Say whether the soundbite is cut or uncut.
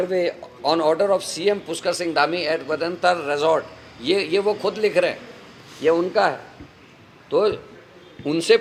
uncut